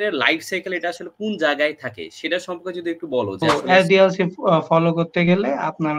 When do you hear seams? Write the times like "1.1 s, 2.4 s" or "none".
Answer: 3.4 s